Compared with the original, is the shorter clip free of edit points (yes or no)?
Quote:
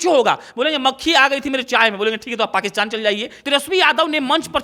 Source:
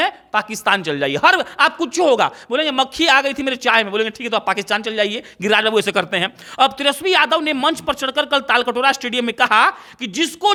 no